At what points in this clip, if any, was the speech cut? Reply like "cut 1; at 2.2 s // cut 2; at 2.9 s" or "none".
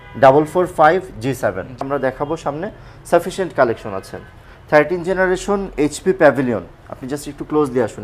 cut 1; at 1.8 s